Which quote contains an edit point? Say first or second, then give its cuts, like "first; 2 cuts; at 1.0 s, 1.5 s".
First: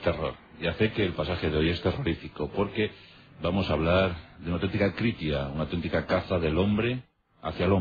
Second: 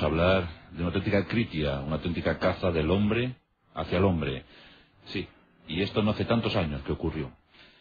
second; 1 cut; at 5.7 s